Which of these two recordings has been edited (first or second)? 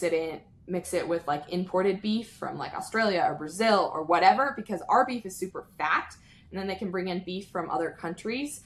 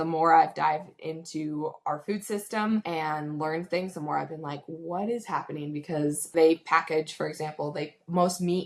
second